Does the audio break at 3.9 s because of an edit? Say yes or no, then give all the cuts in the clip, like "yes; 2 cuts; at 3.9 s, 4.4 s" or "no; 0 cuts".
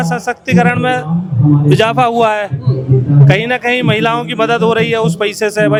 no; 0 cuts